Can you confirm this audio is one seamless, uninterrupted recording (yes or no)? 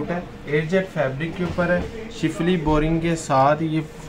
yes